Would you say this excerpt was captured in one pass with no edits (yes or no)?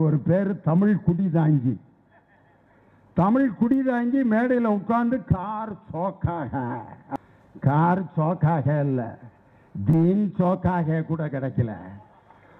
no